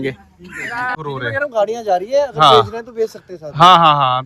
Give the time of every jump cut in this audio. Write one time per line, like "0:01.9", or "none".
0:00.9